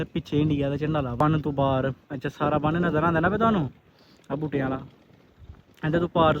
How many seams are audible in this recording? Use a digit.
1